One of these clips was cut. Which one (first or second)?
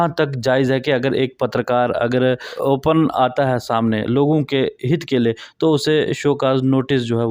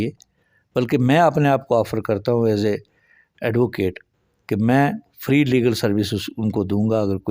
first